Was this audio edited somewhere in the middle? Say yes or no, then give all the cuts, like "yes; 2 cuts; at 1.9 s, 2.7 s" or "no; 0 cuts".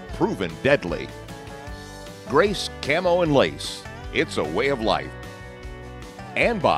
no; 0 cuts